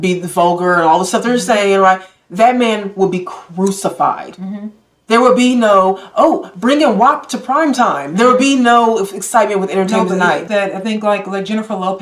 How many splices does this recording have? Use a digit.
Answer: 1